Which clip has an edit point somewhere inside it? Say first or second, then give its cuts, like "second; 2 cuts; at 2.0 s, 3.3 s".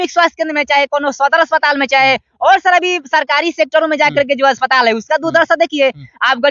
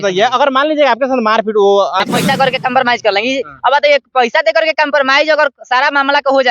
second; 1 cut; at 2.0 s